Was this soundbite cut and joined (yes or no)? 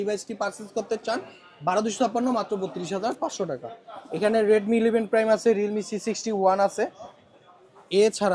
no